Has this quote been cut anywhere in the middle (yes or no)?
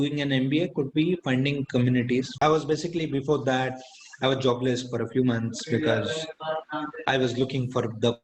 yes